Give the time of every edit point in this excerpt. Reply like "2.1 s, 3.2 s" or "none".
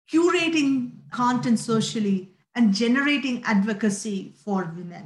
1.1 s